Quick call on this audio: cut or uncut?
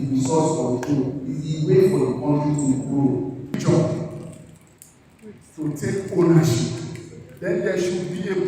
cut